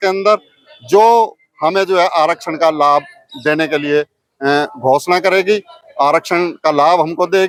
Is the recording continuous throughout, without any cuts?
yes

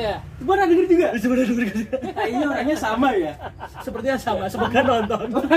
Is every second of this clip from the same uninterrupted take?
yes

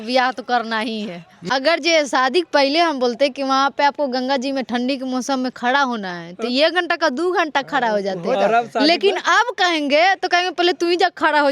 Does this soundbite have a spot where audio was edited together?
yes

